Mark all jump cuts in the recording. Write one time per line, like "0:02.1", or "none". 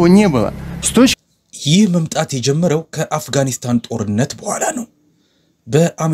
0:01.1